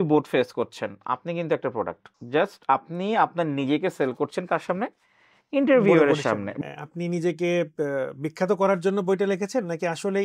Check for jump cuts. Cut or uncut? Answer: cut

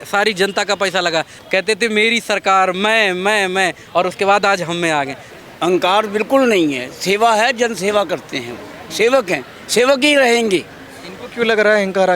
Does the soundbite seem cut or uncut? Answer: cut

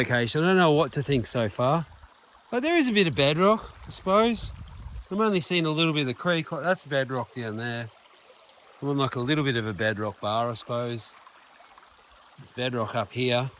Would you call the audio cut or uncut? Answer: uncut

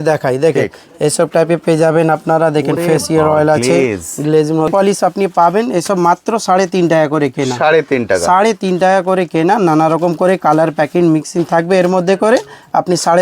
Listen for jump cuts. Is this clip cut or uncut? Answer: cut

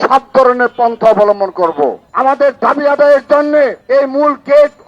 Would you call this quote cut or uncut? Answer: cut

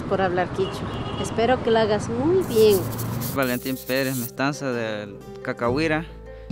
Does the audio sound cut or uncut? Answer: cut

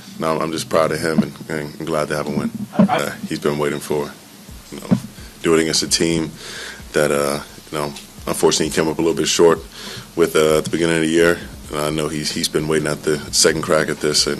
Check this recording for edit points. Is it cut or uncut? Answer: cut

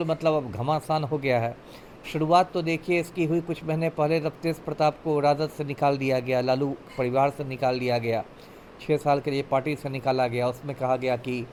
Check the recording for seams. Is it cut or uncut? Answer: uncut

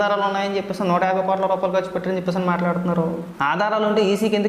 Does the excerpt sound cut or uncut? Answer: cut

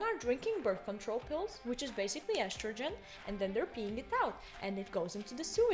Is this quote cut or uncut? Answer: uncut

